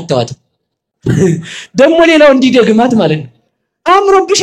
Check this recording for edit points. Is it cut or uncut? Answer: uncut